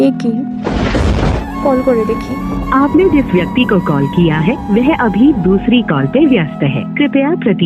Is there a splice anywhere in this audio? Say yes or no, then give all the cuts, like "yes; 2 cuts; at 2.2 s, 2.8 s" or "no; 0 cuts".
yes; 1 cut; at 1.4 s